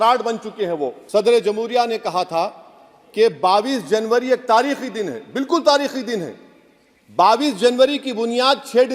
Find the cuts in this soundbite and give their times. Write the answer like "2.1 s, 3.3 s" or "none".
1.0 s